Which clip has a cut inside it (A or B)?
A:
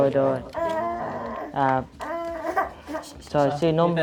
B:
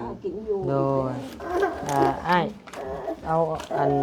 B